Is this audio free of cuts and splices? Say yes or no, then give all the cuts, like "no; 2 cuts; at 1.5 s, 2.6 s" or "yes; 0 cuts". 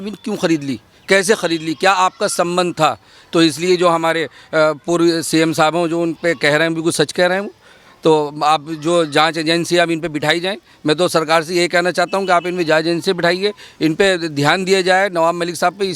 yes; 0 cuts